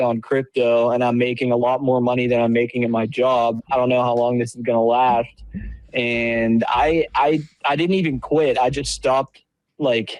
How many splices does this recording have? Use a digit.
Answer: 0